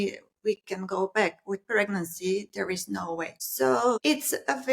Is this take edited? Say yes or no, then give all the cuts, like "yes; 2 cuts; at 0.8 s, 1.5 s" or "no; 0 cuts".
yes; 2 cuts; at 3.4 s, 4.0 s